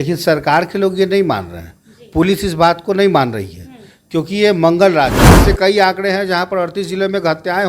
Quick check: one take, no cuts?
no; 1 cut; at 5.4 s

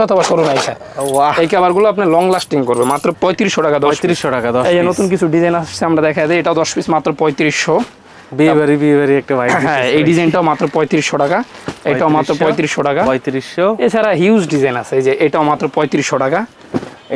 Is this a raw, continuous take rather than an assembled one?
yes; 0 cuts

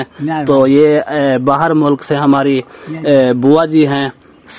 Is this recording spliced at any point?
no; 0 cuts

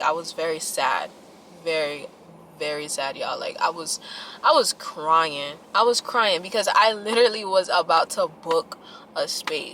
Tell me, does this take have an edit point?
no; 0 cuts

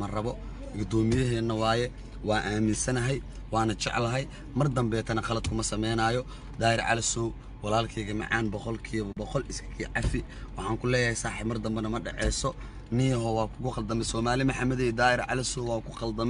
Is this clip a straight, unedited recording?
yes; 0 cuts

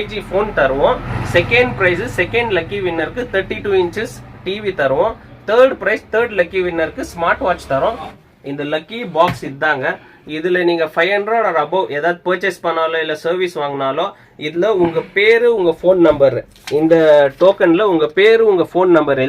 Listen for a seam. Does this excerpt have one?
yes; 2 cuts; at 1.1 s, 8.2 s

